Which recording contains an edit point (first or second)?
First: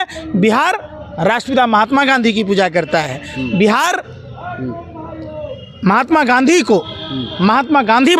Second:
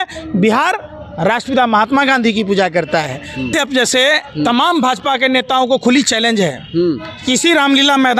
second